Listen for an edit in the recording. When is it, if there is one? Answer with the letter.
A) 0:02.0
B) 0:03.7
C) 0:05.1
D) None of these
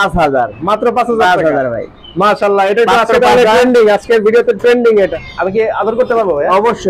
C